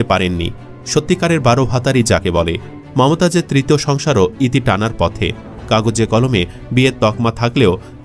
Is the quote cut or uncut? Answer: cut